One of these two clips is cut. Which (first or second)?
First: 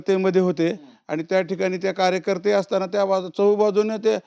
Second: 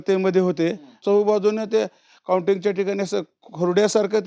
second